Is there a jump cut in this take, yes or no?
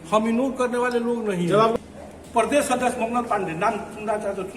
yes